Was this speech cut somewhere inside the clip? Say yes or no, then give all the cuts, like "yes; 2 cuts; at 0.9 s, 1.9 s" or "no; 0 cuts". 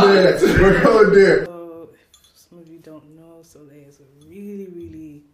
yes; 1 cut; at 1.5 s